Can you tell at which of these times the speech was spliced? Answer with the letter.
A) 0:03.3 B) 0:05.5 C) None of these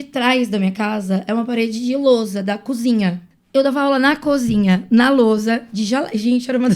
A